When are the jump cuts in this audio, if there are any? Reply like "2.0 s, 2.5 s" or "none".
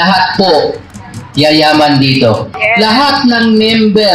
2.5 s